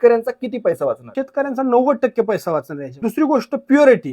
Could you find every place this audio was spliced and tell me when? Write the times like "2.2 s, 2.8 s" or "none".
1.1 s, 3.0 s